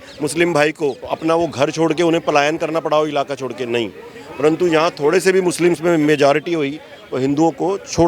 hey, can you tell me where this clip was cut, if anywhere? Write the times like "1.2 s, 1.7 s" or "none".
1.1 s